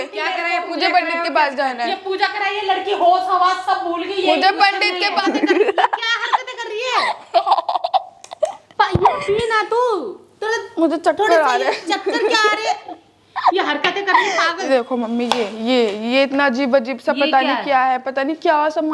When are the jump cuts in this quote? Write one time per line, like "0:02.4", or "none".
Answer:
0:05.1
0:14.6